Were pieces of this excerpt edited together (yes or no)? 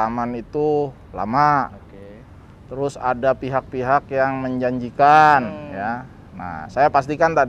no